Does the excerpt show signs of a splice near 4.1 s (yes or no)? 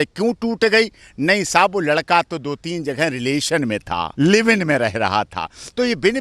yes